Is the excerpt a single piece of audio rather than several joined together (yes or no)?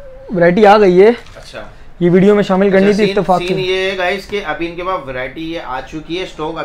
yes